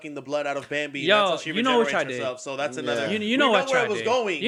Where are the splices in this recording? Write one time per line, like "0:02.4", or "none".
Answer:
none